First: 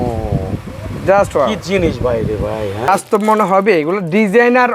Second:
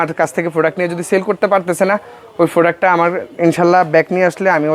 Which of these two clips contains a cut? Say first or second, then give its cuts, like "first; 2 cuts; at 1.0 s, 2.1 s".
first; 1 cut; at 2.9 s